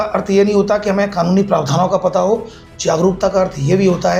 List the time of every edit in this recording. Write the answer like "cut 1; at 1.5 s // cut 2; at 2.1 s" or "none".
none

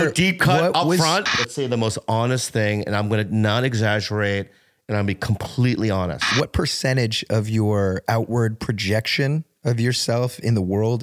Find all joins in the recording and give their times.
cut 1; at 1.3 s // cut 2; at 6.3 s // cut 3; at 8.0 s

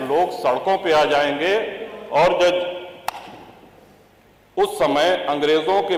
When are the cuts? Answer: none

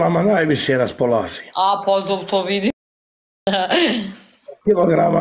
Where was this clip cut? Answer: none

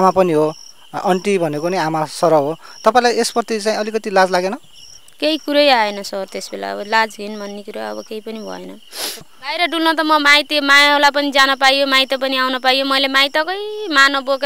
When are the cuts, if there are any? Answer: cut 1; at 9.3 s

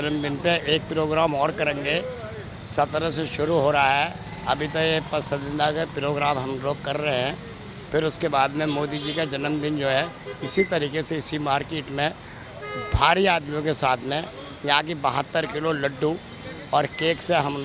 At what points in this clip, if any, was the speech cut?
none

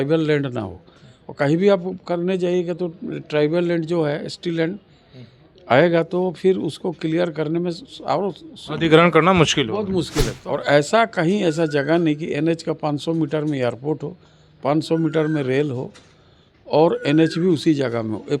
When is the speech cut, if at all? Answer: cut 1; at 10.4 s

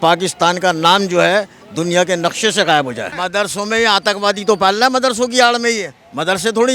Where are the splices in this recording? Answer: cut 1; at 3.1 s

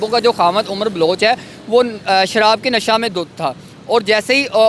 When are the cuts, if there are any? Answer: none

